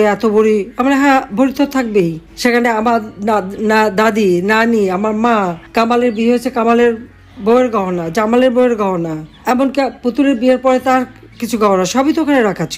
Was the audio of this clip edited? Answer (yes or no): no